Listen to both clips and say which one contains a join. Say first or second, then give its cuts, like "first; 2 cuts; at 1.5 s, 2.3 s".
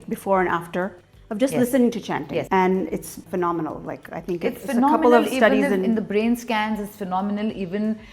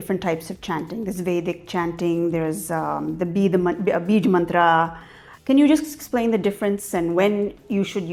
first; 2 cuts; at 2.5 s, 3.2 s